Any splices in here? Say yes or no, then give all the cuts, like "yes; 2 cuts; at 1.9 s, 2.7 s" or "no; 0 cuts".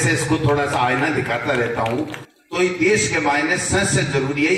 yes; 1 cut; at 2.2 s